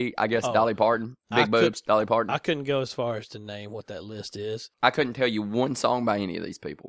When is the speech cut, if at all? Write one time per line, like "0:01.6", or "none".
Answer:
0:04.7